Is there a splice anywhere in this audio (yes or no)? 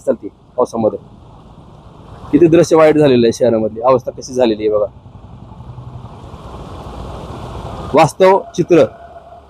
no